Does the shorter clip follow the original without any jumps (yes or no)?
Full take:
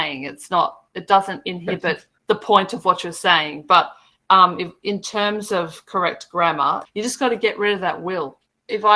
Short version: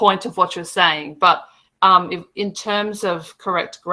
yes